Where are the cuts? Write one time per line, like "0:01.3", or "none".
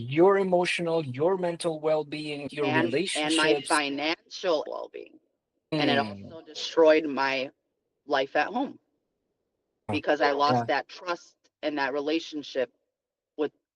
0:04.7
0:09.9